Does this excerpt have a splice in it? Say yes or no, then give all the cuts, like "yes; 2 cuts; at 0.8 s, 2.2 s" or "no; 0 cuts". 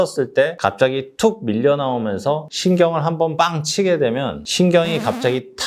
no; 0 cuts